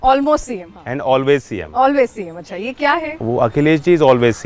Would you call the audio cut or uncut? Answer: uncut